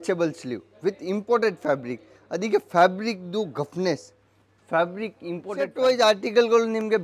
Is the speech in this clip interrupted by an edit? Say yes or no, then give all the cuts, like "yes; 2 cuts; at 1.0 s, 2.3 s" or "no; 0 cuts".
yes; 1 cut; at 5.7 s